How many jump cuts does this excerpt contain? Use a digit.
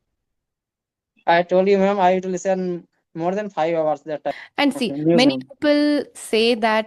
1